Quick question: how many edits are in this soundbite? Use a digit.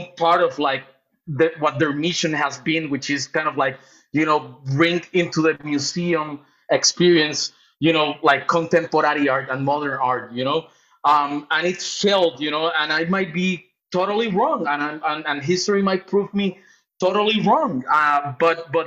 0